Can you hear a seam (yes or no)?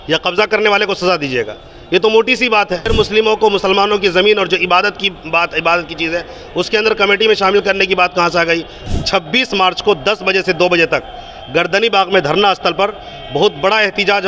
yes